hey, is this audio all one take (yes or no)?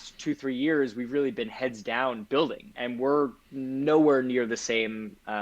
no